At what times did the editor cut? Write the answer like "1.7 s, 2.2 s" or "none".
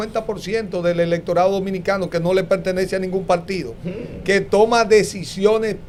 none

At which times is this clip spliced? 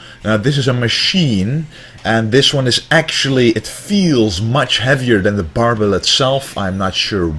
1.7 s

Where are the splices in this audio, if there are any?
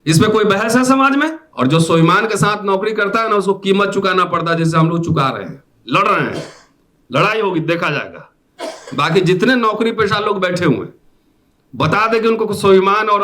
1.4 s

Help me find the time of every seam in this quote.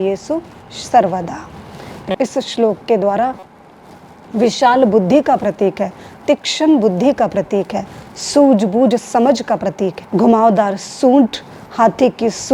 10.0 s

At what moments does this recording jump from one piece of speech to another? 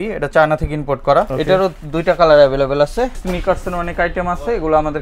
1.3 s, 3.2 s

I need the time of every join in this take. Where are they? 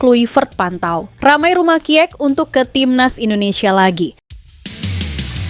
1.1 s, 4.3 s

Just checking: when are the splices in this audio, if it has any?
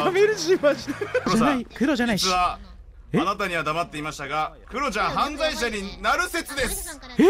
1.3 s, 4.6 s

